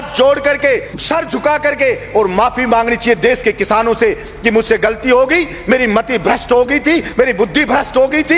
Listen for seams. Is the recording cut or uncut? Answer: cut